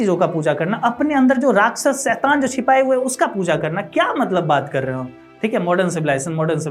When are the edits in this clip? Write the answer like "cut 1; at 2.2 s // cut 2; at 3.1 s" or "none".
none